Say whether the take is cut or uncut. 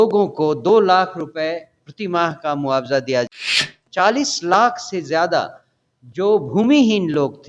cut